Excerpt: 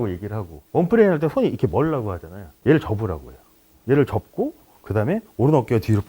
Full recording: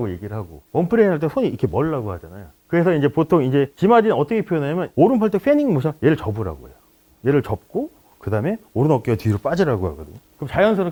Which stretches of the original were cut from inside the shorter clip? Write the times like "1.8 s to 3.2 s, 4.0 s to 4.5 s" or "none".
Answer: 2.6 s to 5.9 s

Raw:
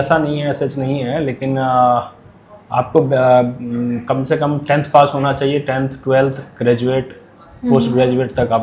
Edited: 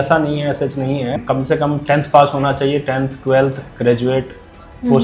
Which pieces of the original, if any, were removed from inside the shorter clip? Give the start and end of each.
1.2 s to 4.0 s

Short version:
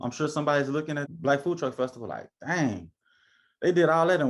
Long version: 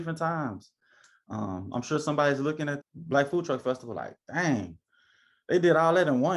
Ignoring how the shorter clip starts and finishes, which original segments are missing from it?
2.8 s to 3.0 s

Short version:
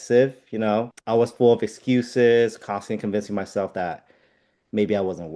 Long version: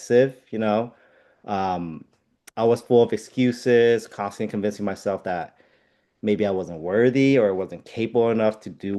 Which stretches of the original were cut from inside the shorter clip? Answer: 1.0 s to 2.5 s

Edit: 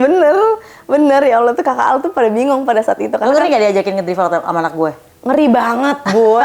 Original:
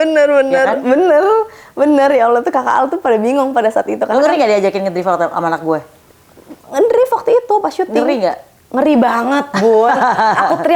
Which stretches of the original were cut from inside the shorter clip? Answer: 6.0 s to 8.6 s

